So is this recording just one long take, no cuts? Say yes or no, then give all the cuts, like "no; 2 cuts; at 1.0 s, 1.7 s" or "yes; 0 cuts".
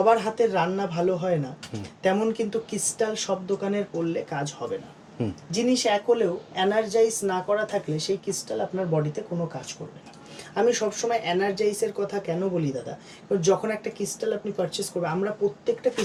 yes; 0 cuts